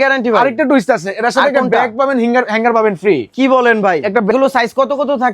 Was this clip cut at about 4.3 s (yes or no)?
yes